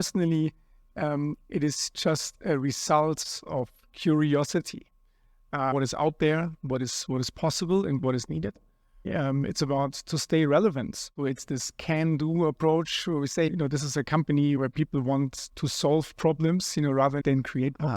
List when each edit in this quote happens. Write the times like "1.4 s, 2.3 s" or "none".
5.7 s, 9.1 s, 11.1 s